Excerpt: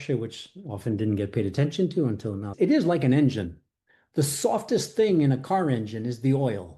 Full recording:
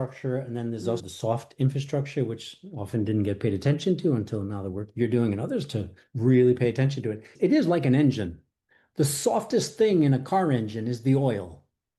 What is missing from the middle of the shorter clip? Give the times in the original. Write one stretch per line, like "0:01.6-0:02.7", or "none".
0:04.5-0:07.2